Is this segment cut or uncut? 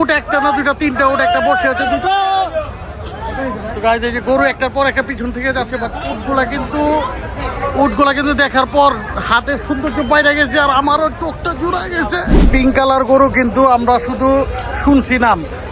cut